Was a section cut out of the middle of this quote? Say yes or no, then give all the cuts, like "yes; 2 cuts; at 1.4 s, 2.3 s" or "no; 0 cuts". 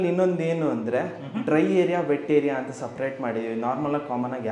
no; 0 cuts